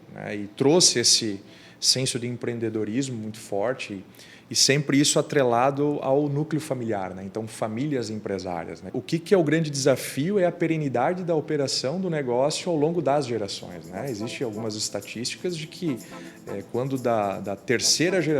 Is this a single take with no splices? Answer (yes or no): no